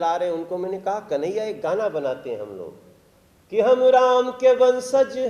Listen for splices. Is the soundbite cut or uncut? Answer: uncut